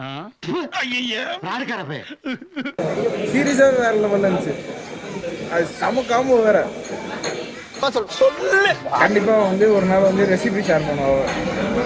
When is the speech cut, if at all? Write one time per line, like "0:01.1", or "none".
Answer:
none

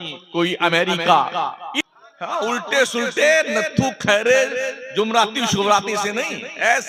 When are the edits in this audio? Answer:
0:01.7

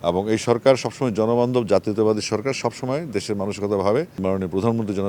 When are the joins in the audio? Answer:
0:04.2

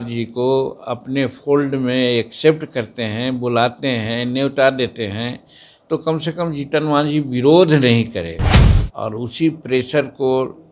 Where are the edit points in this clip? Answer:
0:08.5

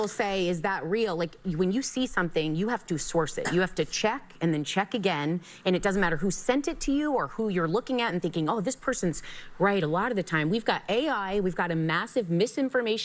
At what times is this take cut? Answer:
none

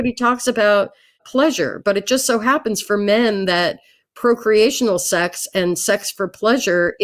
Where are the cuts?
0:01.2

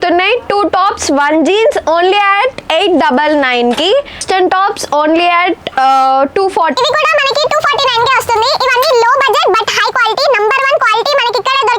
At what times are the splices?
0:04.2
0:06.7

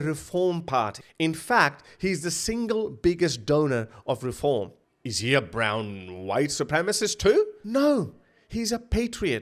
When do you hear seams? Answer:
none

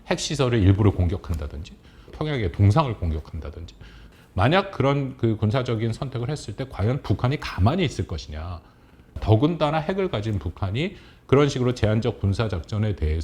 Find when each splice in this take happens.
0:04.1
0:09.0

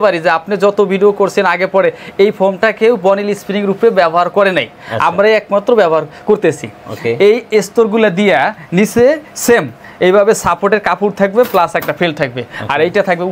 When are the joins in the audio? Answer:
none

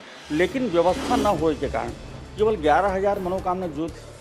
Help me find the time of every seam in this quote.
none

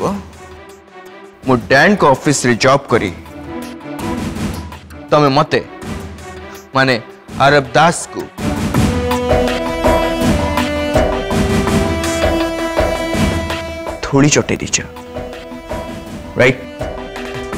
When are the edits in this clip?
none

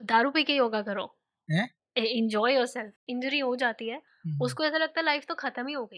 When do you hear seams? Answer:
0:03.0

